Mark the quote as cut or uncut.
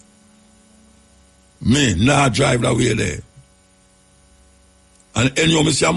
uncut